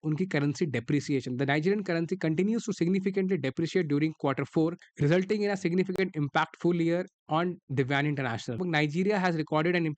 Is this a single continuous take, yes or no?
no